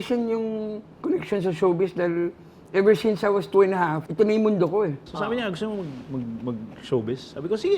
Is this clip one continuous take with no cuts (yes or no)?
no